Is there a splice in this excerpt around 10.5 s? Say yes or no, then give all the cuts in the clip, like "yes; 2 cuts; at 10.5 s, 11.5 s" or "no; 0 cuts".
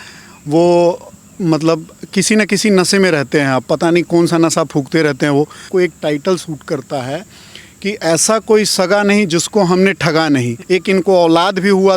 yes; 2 cuts; at 5.7 s, 10.5 s